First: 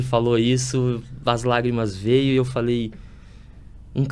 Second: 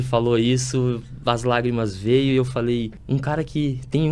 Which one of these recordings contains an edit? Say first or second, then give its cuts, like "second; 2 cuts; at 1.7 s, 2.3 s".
second; 1 cut; at 3.0 s